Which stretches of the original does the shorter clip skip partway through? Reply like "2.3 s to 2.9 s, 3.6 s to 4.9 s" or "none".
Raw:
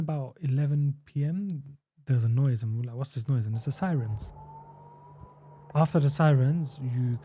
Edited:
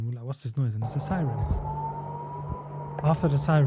none